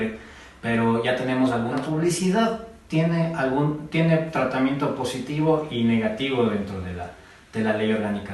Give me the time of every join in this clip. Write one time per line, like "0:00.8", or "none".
0:01.9